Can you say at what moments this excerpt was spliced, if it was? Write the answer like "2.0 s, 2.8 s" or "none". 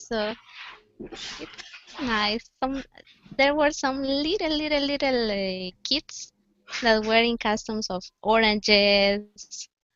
none